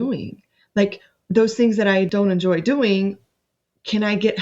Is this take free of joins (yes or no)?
no